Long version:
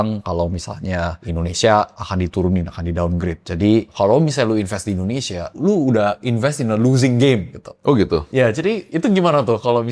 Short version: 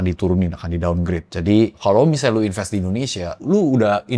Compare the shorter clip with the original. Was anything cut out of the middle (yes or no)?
no